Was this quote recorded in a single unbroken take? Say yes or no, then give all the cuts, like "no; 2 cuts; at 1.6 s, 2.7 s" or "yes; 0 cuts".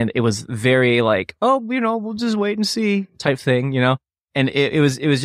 yes; 0 cuts